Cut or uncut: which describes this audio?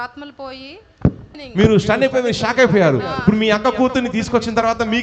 cut